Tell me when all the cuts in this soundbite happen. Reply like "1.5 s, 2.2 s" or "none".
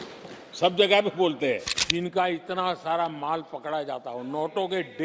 1.7 s